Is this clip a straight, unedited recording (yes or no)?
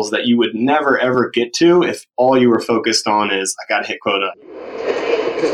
no